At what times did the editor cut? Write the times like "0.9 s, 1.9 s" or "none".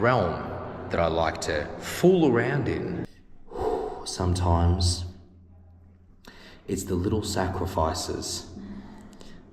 3.0 s